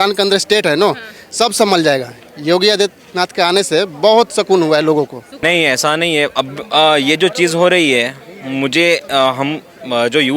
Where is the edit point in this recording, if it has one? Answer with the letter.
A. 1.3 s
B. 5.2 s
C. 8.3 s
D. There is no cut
B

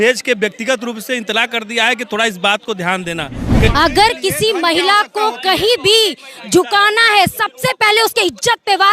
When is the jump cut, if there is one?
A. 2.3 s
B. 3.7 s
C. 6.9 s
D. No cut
B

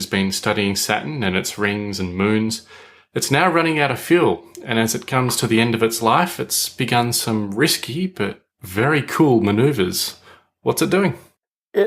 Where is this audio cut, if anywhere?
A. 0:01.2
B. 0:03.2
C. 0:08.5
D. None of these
B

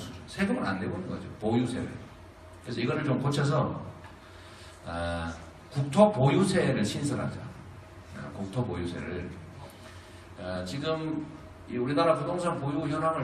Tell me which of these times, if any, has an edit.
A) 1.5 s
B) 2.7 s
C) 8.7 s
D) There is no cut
C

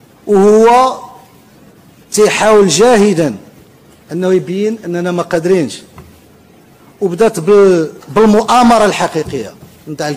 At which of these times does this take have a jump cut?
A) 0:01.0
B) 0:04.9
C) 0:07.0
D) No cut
D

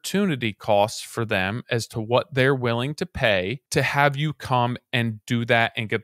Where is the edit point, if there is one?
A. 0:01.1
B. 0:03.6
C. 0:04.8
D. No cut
B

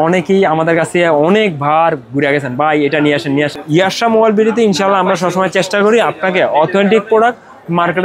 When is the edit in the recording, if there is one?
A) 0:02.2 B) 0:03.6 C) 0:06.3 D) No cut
B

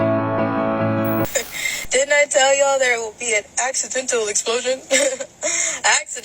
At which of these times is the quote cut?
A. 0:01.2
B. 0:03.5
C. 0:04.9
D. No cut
A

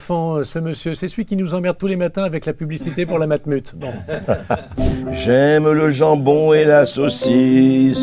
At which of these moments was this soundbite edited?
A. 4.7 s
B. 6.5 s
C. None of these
A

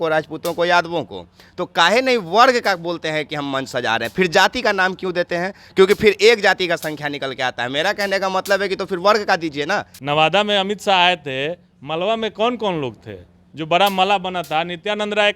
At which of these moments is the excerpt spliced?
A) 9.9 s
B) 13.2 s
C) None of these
A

